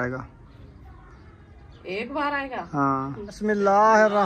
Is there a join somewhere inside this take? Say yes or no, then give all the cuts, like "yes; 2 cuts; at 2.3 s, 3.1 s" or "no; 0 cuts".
yes; 1 cut; at 3.3 s